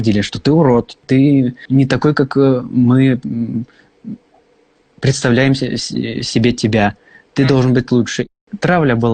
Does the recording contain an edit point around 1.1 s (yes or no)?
yes